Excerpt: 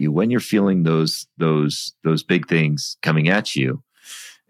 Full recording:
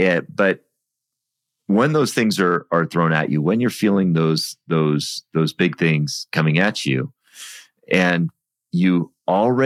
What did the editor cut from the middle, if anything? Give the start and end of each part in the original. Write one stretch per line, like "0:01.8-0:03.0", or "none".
none